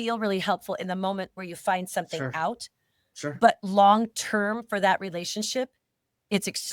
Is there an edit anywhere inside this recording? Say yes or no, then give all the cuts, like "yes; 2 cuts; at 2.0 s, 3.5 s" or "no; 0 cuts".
no; 0 cuts